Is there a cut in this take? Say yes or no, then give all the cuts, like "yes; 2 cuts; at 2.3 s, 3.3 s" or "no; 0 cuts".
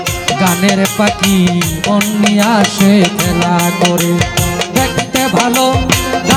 no; 0 cuts